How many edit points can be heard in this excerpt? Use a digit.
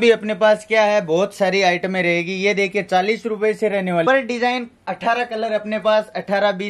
1